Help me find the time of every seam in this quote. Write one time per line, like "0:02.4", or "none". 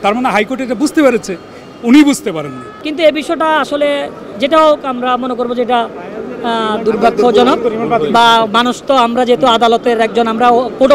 0:02.7